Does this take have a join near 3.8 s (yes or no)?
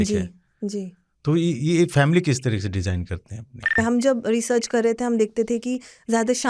yes